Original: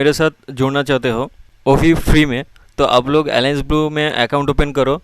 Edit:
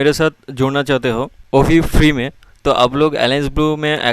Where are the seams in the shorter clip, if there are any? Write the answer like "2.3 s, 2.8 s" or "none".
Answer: 1.3 s